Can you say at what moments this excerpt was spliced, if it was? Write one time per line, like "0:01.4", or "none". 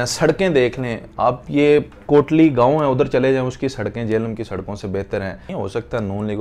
0:05.5